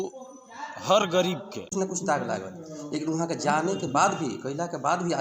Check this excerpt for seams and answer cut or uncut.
cut